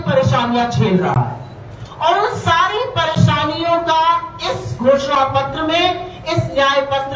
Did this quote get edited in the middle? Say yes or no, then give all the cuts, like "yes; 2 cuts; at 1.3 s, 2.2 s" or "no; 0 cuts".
no; 0 cuts